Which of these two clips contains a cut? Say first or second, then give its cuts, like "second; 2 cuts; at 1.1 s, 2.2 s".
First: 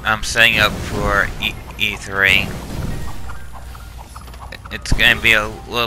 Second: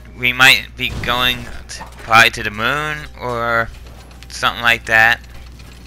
second; 1 cut; at 2.1 s